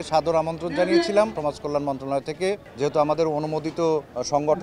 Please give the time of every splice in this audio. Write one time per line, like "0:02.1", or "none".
0:01.4